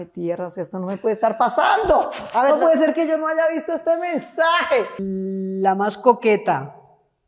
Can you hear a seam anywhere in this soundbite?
yes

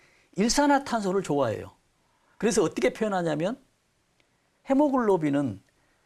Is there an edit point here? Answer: no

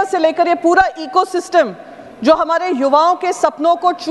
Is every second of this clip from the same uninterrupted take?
yes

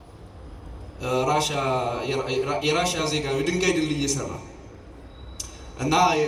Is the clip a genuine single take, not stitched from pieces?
yes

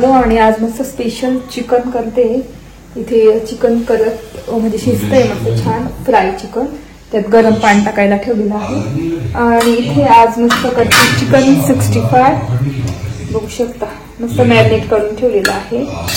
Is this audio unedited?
yes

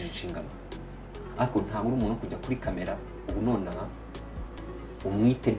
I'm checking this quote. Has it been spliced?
no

